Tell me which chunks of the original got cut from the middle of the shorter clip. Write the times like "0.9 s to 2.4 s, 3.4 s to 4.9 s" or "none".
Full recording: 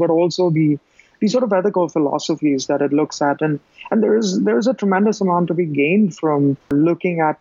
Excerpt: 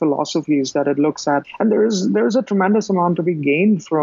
3.4 s to 3.7 s